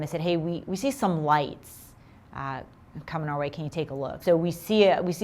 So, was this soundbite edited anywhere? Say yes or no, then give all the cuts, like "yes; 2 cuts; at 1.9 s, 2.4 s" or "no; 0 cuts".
yes; 1 cut; at 4.2 s